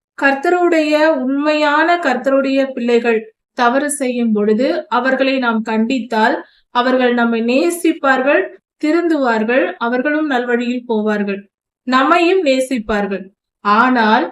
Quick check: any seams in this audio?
no; 0 cuts

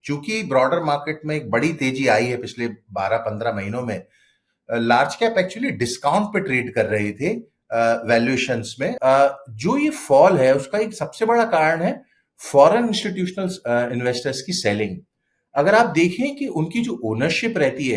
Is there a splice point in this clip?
yes; 1 cut; at 8.9 s

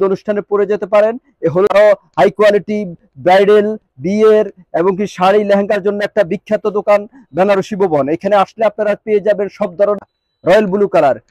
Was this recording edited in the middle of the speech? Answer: yes; 2 cuts; at 1.7 s, 10.1 s

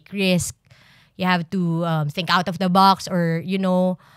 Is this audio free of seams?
yes; 0 cuts

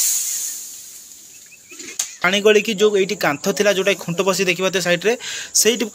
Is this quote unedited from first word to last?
no; 1 cut; at 2.3 s

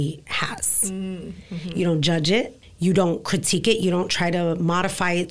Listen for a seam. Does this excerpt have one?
yes; 1 cut; at 2.6 s

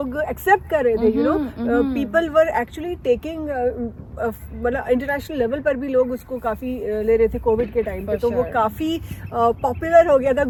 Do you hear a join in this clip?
no; 0 cuts

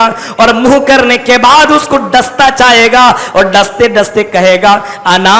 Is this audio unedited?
yes; 0 cuts

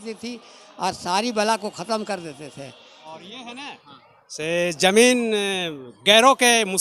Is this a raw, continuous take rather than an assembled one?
no; 1 cut; at 3.0 s

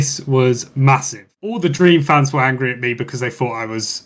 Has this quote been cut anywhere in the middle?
yes; 1 cut; at 1.6 s

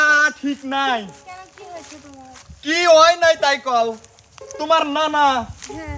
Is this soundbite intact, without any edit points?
yes; 0 cuts

